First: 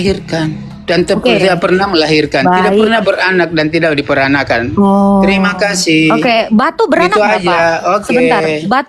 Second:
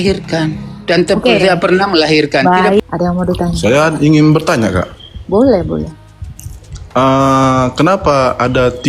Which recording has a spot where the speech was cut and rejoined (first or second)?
second